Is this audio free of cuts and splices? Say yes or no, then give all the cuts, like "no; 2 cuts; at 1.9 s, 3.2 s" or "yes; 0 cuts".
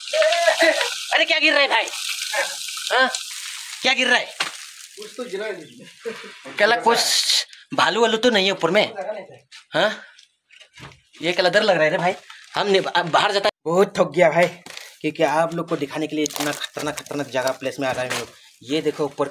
no; 1 cut; at 13.5 s